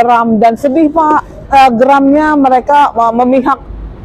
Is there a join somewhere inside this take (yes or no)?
yes